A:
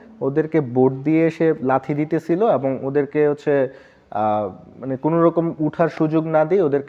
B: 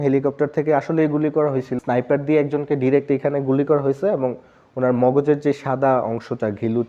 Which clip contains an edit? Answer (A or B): B